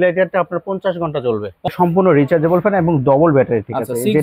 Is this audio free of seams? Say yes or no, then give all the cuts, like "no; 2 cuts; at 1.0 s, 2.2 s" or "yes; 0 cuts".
no; 1 cut; at 1.7 s